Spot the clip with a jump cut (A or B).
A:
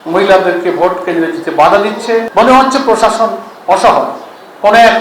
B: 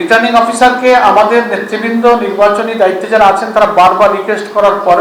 A